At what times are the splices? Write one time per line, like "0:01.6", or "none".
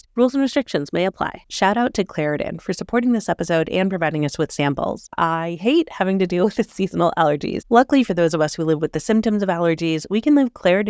0:01.4
0:05.0
0:07.6